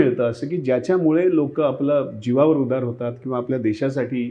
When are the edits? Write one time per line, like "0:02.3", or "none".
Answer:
none